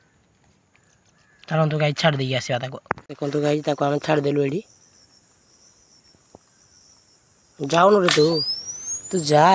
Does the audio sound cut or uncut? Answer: uncut